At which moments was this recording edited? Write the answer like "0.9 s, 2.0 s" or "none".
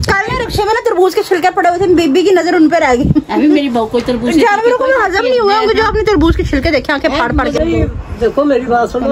7.6 s